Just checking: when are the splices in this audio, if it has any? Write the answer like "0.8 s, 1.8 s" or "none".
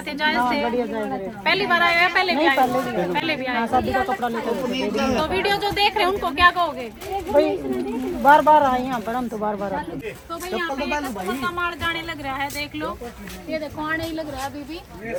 none